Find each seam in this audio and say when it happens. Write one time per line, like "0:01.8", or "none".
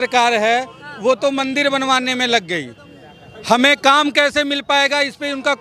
none